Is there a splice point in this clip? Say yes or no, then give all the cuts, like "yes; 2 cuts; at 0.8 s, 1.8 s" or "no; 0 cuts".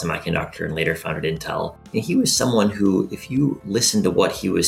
yes; 2 cuts; at 1.8 s, 3.6 s